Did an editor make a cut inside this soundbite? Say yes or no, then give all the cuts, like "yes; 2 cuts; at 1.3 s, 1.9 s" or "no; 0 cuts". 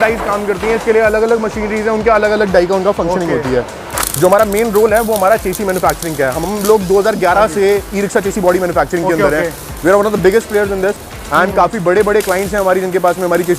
yes; 1 cut; at 3.9 s